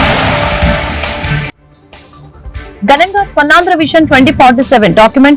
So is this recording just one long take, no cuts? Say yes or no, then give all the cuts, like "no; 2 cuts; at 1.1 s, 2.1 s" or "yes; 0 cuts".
no; 1 cut; at 2.7 s